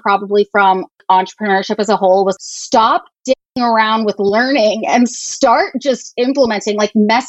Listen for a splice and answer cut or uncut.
cut